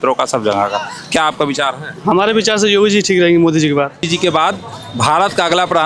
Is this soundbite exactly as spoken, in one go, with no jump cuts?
no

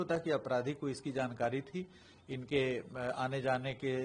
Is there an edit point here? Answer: no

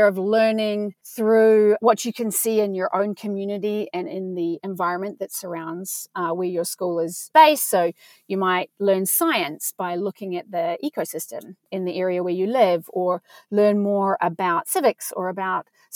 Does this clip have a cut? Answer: yes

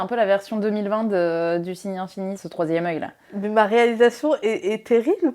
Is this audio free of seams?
no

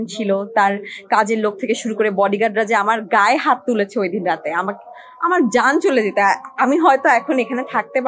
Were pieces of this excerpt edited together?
no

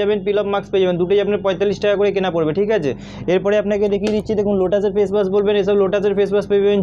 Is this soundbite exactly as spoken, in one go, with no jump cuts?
yes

